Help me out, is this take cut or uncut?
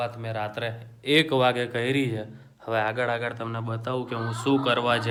uncut